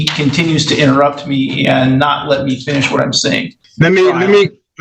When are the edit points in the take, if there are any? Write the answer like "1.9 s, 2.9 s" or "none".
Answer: 3.6 s

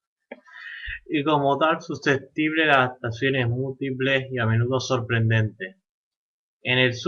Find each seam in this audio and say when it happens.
5.6 s

